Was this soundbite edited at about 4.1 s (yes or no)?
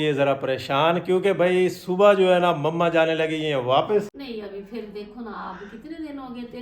yes